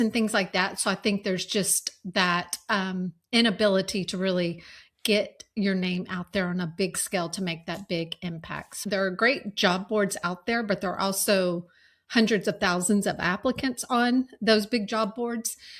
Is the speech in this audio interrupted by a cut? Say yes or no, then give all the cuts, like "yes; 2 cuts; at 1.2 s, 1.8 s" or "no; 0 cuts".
yes; 1 cut; at 8.8 s